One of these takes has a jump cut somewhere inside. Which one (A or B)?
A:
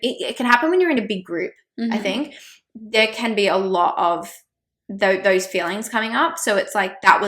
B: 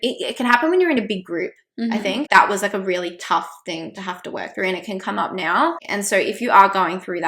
B